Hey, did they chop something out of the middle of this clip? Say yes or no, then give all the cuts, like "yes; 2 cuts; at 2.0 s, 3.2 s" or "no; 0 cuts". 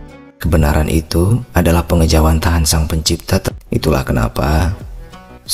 yes; 1 cut; at 3.5 s